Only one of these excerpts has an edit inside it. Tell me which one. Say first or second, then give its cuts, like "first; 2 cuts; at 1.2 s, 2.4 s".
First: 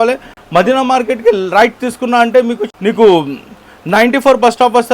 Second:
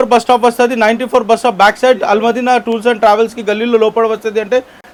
first; 1 cut; at 2.6 s